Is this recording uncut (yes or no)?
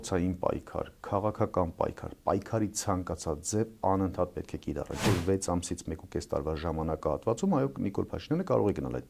no